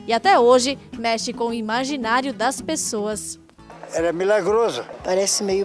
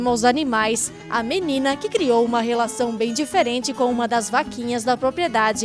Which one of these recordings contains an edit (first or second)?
first